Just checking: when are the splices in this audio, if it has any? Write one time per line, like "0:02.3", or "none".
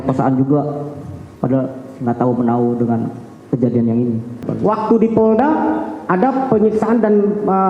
0:04.5